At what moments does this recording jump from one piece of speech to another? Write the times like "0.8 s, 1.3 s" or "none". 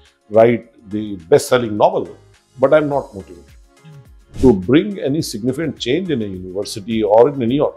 4.3 s